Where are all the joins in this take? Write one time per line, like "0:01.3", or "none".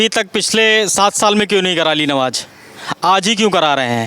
none